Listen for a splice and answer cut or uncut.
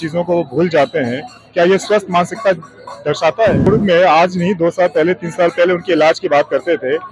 cut